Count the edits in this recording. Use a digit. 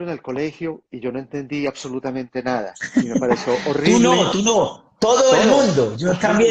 0